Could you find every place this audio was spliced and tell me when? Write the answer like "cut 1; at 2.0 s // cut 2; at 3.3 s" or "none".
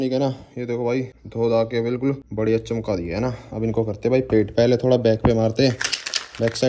cut 1; at 1.2 s // cut 2; at 2.3 s